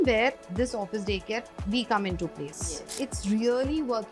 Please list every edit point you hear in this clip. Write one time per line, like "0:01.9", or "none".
0:02.9